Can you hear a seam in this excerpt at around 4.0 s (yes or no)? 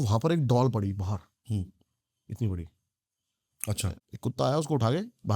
yes